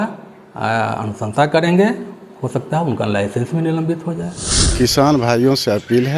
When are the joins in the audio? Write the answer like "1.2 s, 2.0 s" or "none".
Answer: 4.6 s